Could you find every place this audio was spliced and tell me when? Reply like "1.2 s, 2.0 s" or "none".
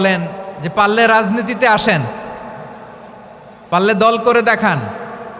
none